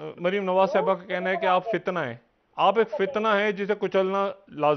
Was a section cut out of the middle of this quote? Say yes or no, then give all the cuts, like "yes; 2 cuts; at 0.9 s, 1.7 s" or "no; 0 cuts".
no; 0 cuts